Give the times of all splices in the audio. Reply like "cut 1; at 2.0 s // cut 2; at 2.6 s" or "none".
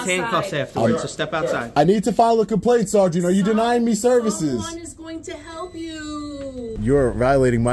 cut 1; at 1.7 s // cut 2; at 6.8 s